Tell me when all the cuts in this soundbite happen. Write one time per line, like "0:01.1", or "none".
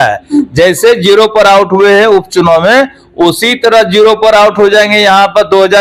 none